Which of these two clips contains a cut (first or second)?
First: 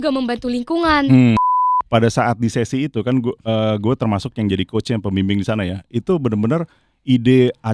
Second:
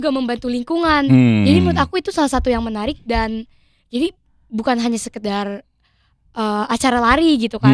first